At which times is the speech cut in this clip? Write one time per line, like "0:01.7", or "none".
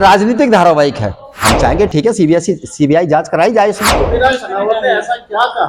0:01.3
0:03.9